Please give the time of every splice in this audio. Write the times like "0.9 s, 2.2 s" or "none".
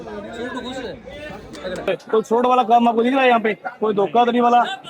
1.9 s